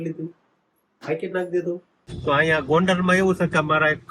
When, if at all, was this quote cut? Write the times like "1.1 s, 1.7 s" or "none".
2.1 s